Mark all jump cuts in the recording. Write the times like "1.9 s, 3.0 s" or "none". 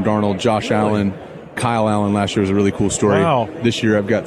1.5 s